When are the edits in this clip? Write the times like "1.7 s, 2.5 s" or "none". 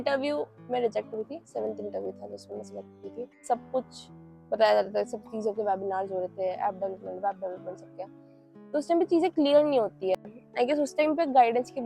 3.4 s

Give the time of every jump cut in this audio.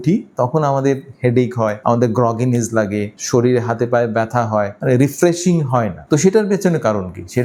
none

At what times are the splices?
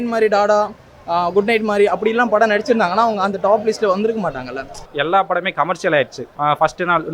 4.8 s, 6.2 s

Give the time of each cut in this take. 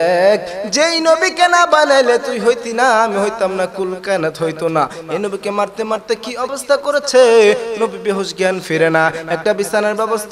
none

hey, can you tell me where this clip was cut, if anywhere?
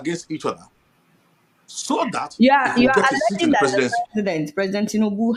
none

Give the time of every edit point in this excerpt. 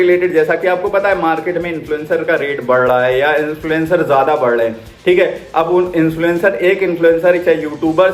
none

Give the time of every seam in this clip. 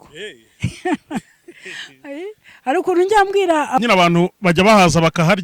3.8 s

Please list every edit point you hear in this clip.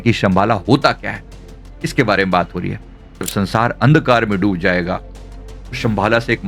3.3 s

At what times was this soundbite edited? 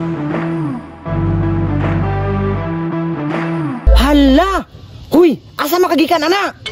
3.9 s

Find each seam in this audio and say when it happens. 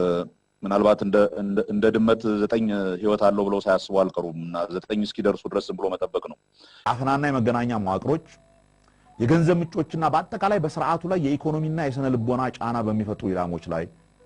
6.9 s

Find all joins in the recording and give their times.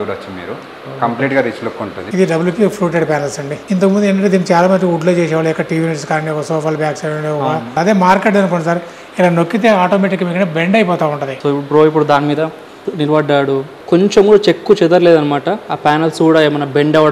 2.0 s, 3.5 s, 7.8 s, 11.3 s, 13.7 s

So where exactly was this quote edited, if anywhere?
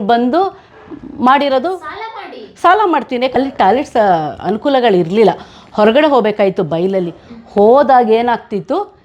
3.4 s

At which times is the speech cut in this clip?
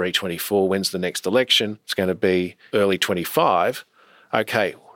1.8 s, 2.6 s

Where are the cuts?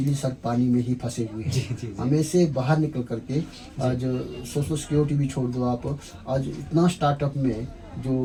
none

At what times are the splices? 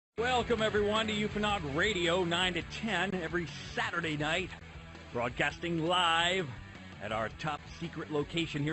5.0 s

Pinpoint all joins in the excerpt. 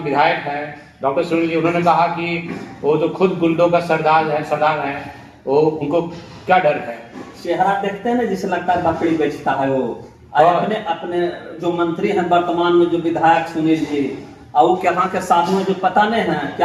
none

